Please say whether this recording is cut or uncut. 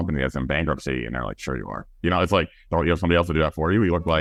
uncut